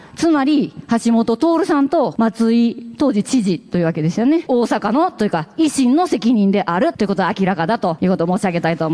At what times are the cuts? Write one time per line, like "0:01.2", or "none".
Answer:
0:02.1
0:04.4
0:06.9
0:08.0

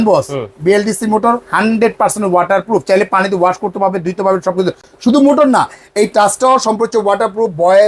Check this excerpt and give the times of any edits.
none

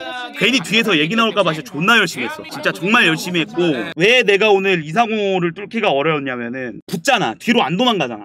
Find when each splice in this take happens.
0:03.9

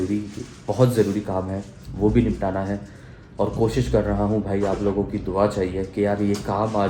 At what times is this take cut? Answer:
none

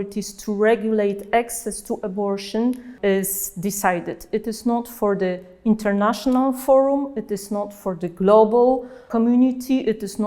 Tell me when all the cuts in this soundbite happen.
0:02.9
0:09.1

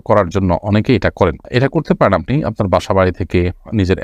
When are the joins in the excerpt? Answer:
none

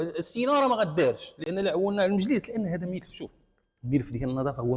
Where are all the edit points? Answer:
none

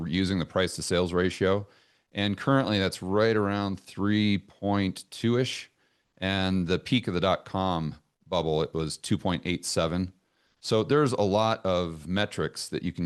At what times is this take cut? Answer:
none

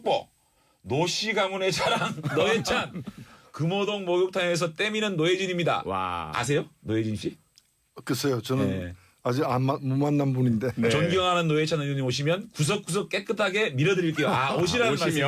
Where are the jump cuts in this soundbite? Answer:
none

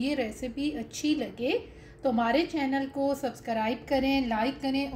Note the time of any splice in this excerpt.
none

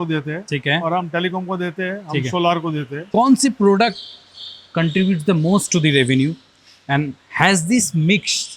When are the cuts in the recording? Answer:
0:03.0

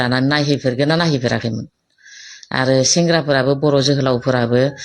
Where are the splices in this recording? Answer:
none

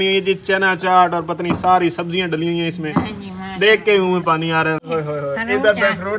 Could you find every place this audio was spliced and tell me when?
0:04.9

